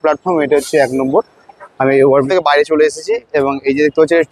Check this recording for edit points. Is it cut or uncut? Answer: cut